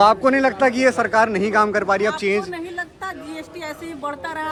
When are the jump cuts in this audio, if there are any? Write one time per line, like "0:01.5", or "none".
none